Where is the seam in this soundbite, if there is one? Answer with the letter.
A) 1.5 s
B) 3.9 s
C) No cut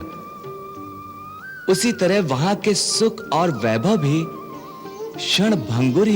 C